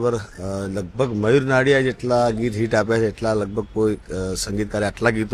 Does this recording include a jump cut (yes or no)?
no